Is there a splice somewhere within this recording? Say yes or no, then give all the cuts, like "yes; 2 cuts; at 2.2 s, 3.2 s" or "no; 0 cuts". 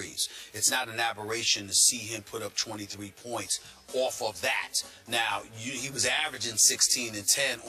yes; 1 cut; at 4.8 s